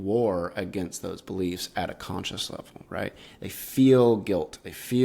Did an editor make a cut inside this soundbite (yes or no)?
no